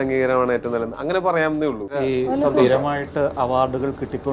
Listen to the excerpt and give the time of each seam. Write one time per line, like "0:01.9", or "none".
0:01.9